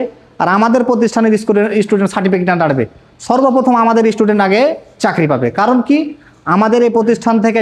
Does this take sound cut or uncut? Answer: uncut